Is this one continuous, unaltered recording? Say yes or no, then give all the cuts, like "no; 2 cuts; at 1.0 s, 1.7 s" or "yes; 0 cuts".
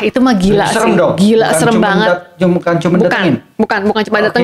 yes; 0 cuts